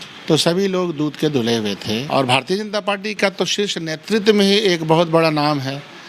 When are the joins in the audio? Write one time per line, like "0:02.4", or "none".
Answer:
0:02.0